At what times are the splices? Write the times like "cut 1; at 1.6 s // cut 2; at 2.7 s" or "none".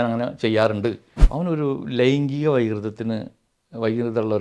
cut 1; at 1.2 s